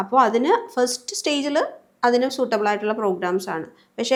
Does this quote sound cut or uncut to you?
uncut